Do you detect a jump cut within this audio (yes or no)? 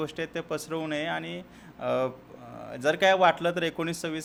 no